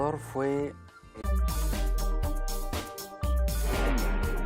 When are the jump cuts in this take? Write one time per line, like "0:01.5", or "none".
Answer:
none